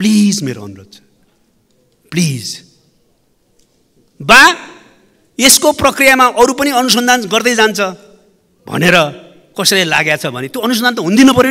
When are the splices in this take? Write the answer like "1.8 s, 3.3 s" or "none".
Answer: none